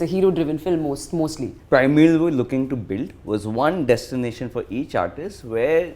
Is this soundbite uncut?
no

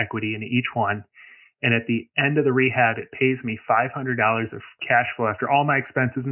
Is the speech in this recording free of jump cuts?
no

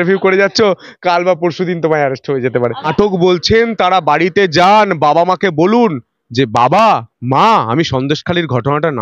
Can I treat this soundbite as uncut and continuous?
no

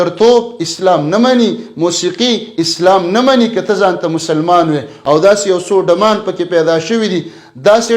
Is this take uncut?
no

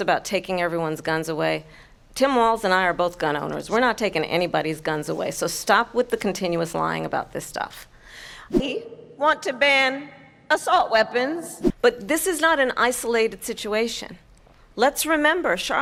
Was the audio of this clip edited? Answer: no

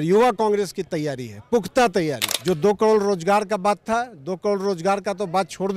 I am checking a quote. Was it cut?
yes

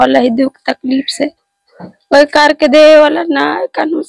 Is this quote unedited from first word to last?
yes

